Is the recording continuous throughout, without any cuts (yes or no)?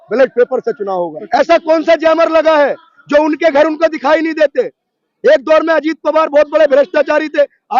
no